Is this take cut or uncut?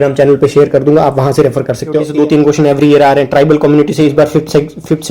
cut